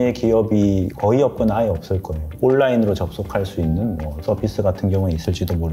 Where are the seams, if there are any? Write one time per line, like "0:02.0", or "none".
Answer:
none